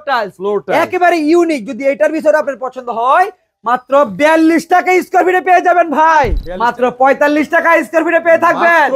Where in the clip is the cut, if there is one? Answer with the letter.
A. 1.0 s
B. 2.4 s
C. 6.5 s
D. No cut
C